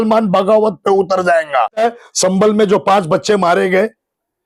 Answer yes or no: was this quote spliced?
yes